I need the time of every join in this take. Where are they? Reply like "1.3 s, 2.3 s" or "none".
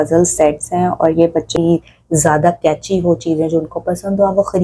1.5 s